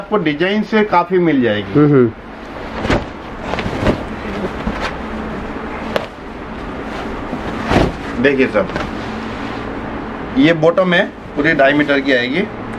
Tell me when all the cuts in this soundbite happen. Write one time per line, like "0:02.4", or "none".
none